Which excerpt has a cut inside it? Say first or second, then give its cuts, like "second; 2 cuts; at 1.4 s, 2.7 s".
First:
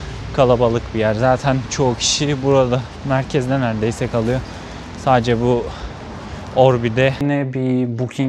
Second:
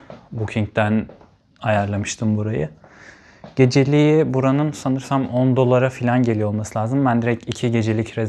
first; 1 cut; at 7.2 s